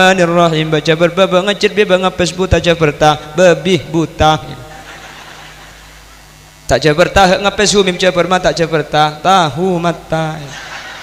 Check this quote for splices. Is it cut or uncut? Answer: uncut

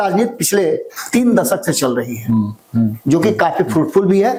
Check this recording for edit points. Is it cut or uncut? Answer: uncut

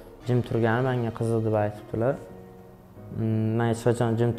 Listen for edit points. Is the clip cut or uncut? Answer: uncut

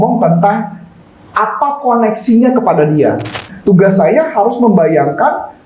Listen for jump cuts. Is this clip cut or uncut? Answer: cut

